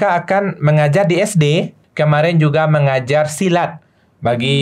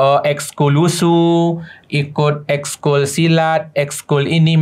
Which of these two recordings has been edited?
first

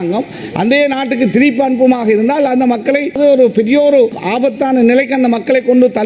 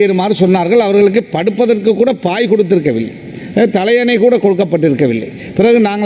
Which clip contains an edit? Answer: first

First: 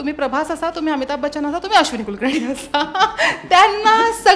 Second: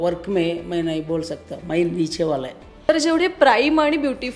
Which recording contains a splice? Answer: second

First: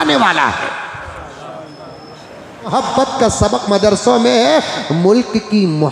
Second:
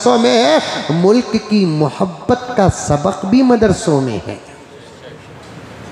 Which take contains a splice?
first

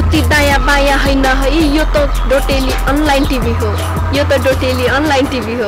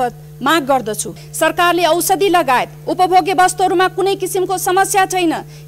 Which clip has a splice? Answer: second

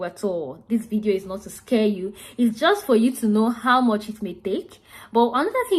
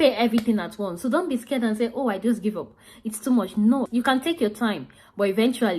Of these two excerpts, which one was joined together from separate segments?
second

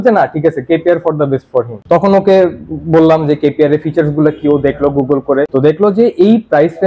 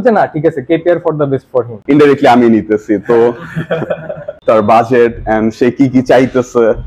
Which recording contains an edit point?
second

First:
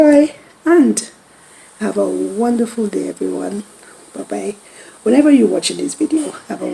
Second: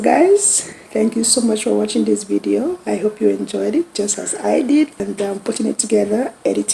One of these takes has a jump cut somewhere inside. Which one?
second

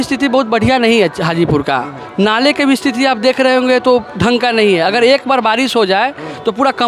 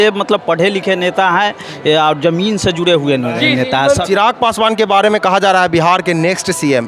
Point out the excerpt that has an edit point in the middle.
second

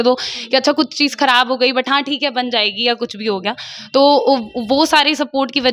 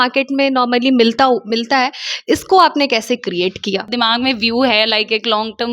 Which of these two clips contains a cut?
second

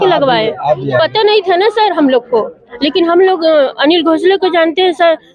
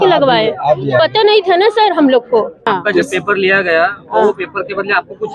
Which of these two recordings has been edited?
second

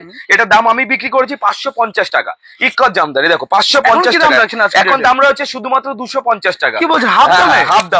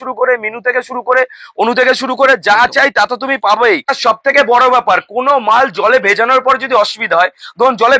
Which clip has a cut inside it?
second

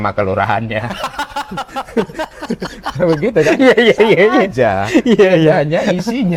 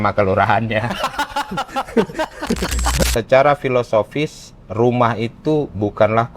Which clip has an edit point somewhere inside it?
second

